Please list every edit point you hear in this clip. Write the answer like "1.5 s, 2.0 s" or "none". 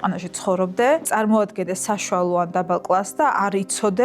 1.1 s